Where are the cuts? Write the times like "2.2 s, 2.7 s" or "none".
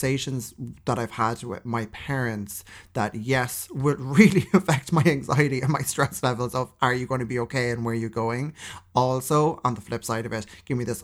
none